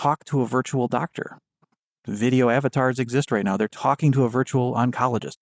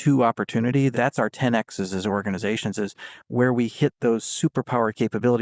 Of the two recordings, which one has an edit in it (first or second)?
second